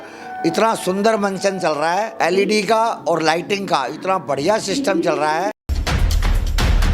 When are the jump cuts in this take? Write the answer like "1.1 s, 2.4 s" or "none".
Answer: 2.1 s, 5.6 s